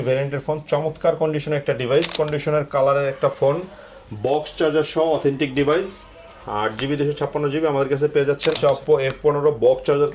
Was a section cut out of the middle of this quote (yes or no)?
yes